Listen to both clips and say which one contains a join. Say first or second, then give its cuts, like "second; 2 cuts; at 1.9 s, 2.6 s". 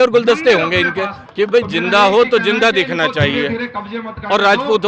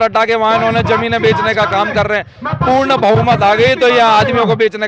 first; 1 cut; at 1.2 s